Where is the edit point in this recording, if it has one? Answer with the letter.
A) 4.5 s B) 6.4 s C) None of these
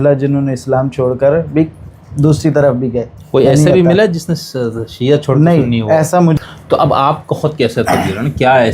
B